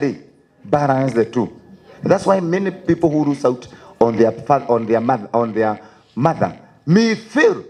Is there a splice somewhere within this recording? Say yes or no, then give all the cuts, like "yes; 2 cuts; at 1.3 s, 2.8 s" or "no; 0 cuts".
no; 0 cuts